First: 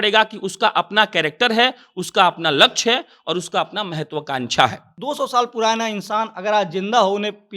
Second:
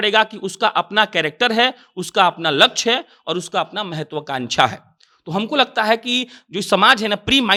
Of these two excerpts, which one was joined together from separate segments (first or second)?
first